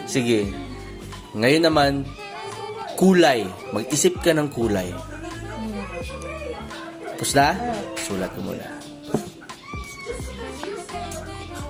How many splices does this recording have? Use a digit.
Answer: 0